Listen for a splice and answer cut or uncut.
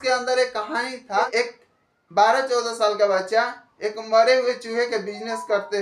cut